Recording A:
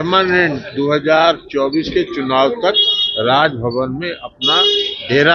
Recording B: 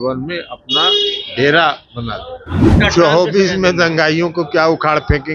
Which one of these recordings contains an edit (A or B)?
B